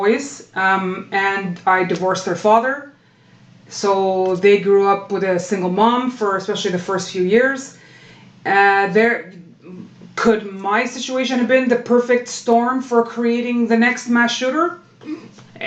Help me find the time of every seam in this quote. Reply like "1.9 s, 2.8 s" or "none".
none